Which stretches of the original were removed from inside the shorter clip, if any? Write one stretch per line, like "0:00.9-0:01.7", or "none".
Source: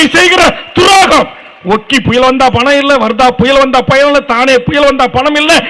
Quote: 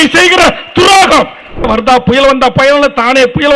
0:01.7-0:03.0